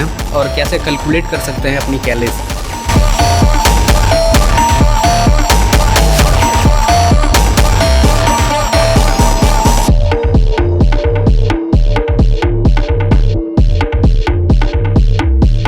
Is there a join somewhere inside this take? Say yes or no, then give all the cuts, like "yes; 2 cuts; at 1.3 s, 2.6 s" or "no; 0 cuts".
no; 0 cuts